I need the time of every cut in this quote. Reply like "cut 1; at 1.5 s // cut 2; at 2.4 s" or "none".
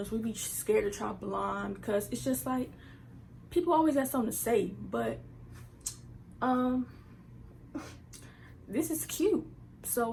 none